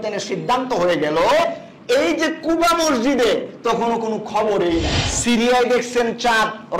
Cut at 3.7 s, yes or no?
no